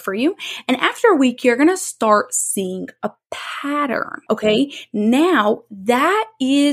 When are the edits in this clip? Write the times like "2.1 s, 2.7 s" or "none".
4.4 s